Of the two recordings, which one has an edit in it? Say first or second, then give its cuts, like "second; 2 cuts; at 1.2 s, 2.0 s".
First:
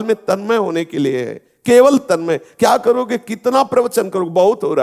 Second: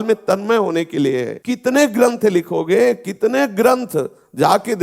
second; 1 cut; at 1.3 s